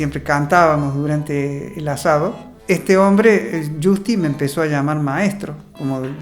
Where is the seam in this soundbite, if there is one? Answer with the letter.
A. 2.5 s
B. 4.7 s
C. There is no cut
A